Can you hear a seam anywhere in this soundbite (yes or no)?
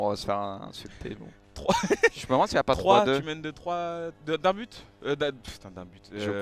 no